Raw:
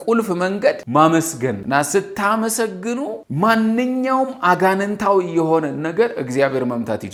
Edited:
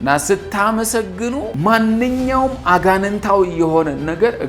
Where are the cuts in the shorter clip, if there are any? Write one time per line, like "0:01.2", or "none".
0:01.5